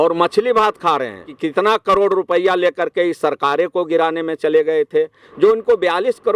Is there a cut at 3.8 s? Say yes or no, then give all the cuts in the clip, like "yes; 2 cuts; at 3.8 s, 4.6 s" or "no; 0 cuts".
no; 2 cuts; at 1.4 s, 5.2 s